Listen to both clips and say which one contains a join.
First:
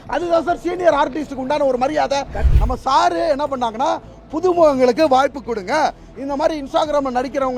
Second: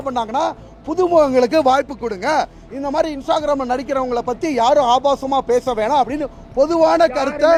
first; 1 cut; at 2.4 s

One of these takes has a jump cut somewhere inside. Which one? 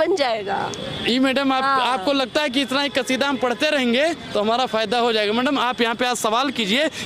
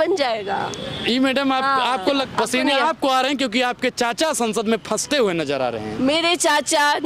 second; 1 cut; at 2.3 s

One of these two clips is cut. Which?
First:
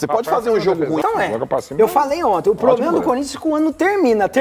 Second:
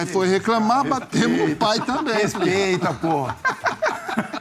first; 1 cut; at 1.0 s

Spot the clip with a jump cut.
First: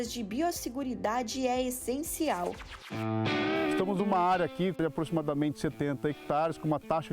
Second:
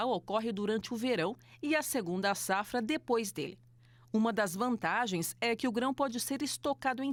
first; 1 cut; at 2.8 s

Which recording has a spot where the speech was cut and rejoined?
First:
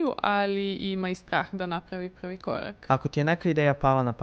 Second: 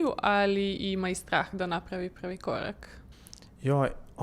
first; 1 cut; at 2.7 s

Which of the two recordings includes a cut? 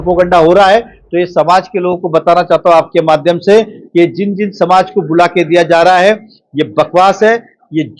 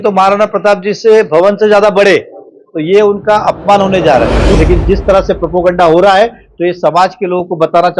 second; 1 cut; at 4.5 s

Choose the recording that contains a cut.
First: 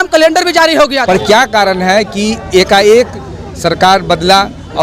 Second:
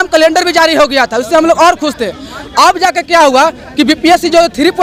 first; 1 cut; at 1.0 s

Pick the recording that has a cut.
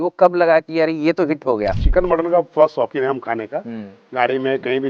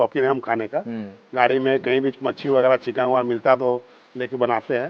first; 1 cut; at 1.8 s

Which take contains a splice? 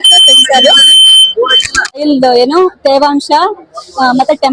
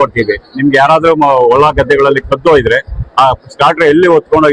first; 1 cut; at 2.0 s

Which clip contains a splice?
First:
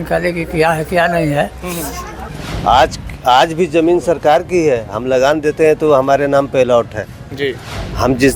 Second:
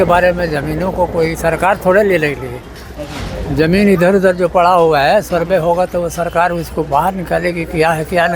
first; 1 cut; at 2.1 s

